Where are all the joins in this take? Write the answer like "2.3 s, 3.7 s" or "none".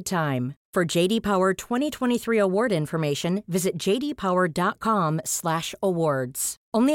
none

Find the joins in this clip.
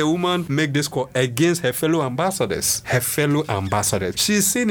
none

